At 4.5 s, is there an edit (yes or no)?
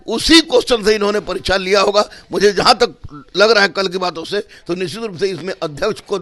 no